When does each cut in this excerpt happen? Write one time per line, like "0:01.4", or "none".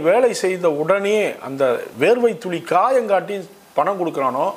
none